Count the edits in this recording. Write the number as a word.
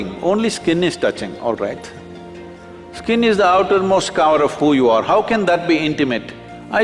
zero